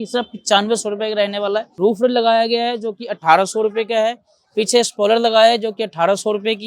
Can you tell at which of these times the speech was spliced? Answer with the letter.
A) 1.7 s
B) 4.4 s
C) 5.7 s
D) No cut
A